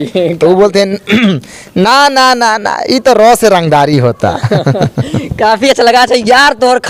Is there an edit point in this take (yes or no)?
no